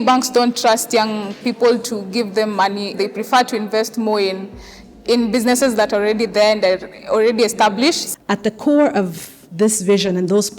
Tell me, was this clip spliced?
yes; 2 cuts; at 2.9 s, 8.0 s

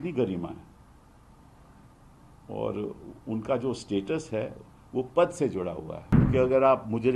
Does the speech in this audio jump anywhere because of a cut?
yes; 1 cut; at 6.1 s

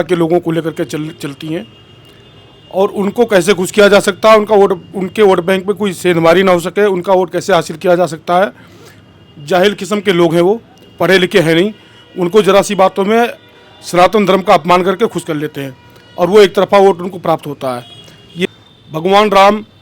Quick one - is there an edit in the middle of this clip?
yes; 1 cut; at 18.5 s

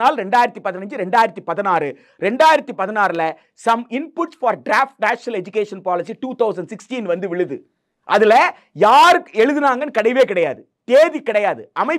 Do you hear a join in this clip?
no; 0 cuts

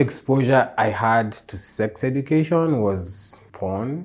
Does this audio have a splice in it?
no; 0 cuts

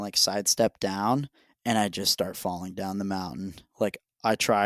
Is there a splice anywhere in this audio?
no; 0 cuts

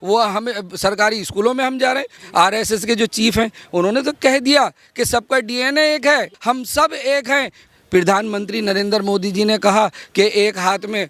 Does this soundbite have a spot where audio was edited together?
yes; 3 cuts; at 2.2 s, 6.3 s, 7.6 s

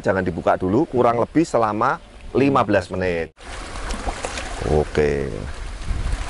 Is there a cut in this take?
yes; 1 cut; at 3.3 s

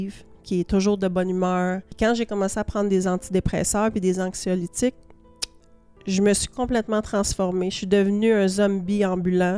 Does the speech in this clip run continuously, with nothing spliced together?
no; 1 cut; at 1.9 s

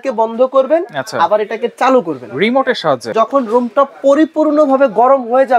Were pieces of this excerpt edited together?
yes; 1 cut; at 3.1 s

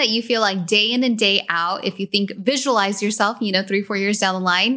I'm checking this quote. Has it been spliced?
no; 0 cuts

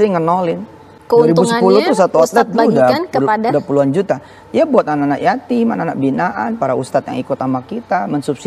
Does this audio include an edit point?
yes; 1 cut; at 1.0 s

